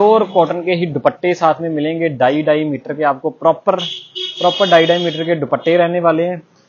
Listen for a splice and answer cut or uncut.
uncut